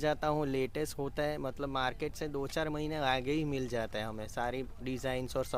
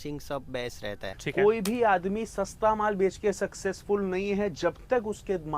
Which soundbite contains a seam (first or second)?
second